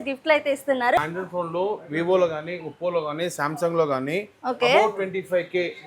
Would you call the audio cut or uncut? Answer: cut